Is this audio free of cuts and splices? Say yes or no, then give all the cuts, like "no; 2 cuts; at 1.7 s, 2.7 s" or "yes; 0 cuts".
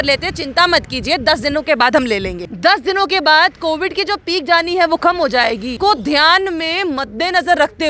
no; 2 cuts; at 2.4 s, 5.7 s